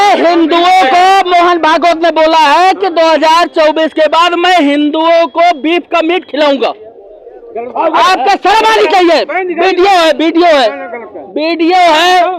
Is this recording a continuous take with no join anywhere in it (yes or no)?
yes